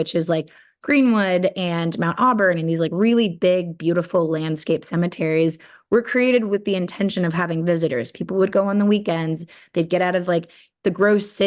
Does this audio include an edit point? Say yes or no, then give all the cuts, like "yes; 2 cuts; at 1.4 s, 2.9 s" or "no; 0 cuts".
no; 0 cuts